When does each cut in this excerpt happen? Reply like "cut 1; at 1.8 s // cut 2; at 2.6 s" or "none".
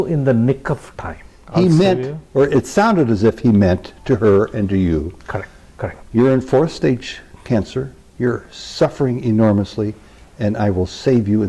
cut 1; at 1.3 s